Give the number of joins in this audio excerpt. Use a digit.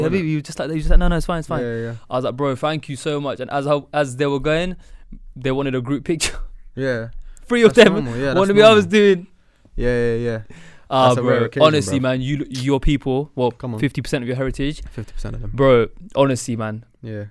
0